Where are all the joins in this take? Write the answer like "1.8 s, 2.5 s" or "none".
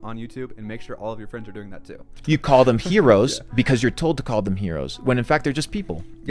2.1 s